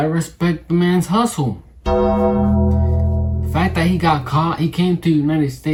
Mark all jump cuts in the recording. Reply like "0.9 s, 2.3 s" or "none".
none